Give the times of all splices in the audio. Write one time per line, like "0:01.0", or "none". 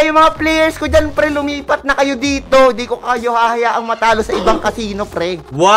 none